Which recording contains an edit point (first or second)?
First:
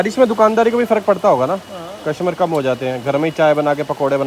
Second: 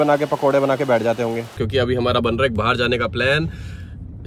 second